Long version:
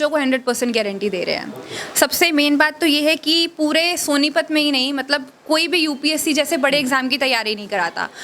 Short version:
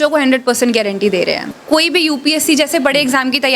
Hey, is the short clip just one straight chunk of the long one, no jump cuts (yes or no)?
no